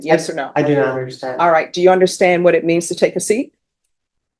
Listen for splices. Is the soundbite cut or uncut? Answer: uncut